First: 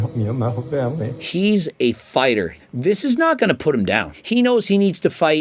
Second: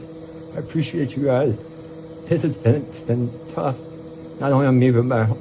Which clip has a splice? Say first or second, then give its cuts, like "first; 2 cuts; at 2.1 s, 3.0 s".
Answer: first; 3 cuts; at 1.1 s, 2.6 s, 4.2 s